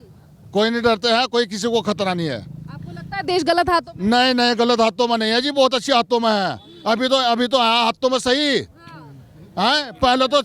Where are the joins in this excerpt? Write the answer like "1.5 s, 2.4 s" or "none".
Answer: none